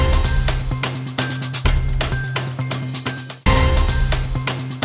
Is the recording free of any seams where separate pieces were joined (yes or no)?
no